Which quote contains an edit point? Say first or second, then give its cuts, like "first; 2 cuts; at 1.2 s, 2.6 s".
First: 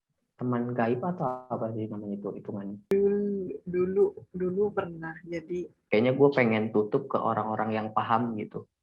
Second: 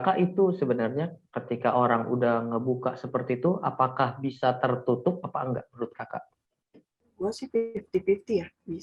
first; 1 cut; at 5.8 s